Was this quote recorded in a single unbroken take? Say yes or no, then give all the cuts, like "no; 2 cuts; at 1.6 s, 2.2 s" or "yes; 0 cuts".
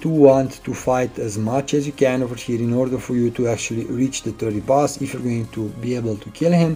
yes; 0 cuts